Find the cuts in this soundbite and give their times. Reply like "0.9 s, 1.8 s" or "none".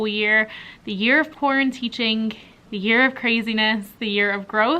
none